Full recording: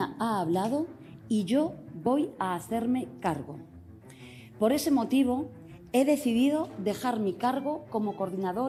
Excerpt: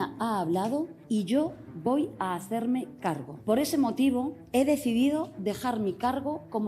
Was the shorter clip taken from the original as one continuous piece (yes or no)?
no